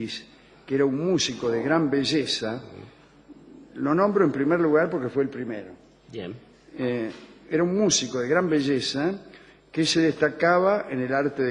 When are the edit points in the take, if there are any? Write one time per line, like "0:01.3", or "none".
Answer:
0:03.6